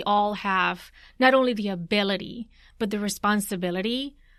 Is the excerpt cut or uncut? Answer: uncut